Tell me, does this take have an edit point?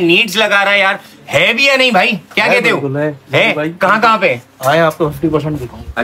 no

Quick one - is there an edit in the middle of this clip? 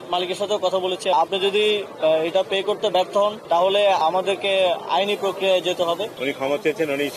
yes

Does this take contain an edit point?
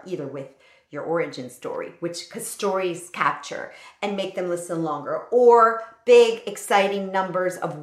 no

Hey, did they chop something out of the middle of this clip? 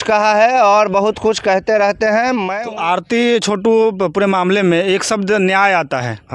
yes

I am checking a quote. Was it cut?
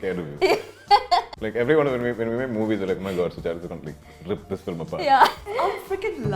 yes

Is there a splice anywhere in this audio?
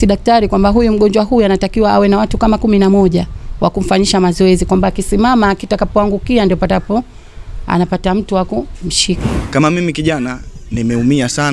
yes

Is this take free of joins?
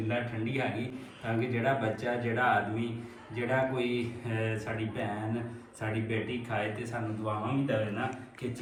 yes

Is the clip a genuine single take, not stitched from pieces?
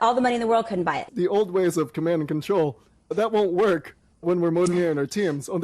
no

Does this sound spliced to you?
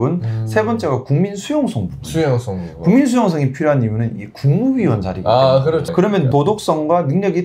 yes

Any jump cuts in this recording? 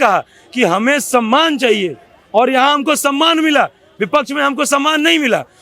no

